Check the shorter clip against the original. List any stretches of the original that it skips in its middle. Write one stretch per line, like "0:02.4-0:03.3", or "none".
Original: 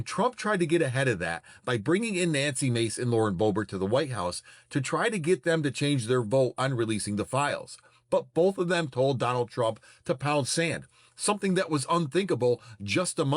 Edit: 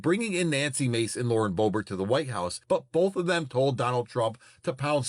0:04.4-0:08.0